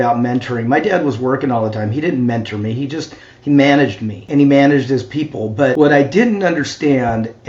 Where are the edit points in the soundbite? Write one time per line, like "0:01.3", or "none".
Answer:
0:04.2
0:05.7